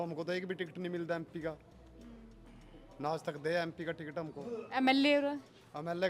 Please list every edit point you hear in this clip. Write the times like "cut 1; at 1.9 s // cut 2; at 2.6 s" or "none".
none